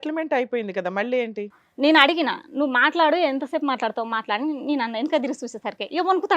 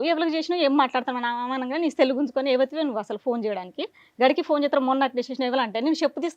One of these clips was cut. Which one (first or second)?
first